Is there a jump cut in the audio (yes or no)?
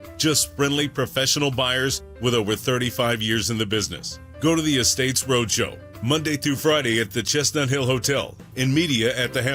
no